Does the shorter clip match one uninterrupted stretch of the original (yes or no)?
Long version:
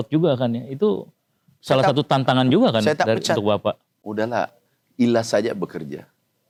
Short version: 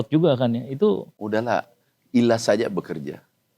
no